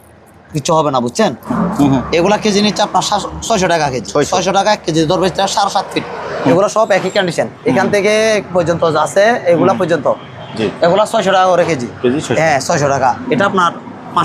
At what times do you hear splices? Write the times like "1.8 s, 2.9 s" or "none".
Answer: 1.4 s, 6.5 s, 13.2 s